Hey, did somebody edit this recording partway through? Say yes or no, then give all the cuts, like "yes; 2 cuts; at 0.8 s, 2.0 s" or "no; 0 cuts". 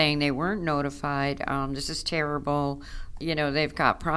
yes; 1 cut; at 3.2 s